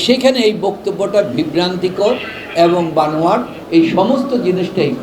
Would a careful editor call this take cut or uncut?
cut